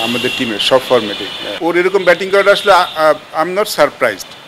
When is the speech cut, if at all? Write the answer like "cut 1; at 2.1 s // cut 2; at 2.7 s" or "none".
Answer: cut 1; at 1.5 s